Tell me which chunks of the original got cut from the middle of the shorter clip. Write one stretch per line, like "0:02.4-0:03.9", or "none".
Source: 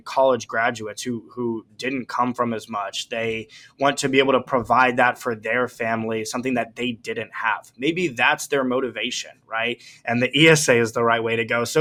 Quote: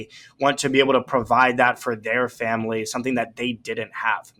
none